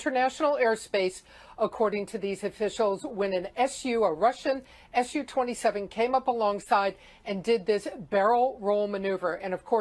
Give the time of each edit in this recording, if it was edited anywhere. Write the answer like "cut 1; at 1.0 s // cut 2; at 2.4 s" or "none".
cut 1; at 8.4 s